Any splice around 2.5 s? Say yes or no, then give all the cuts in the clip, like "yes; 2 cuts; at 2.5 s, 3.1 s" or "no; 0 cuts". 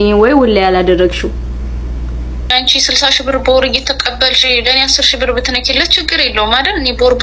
yes; 1 cut; at 2.5 s